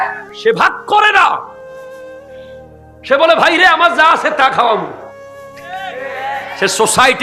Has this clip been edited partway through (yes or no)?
no